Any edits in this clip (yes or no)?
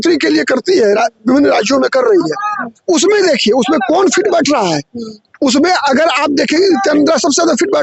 no